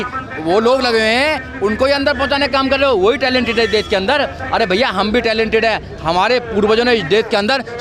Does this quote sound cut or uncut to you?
uncut